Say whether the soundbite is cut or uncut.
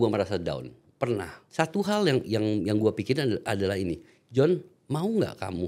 cut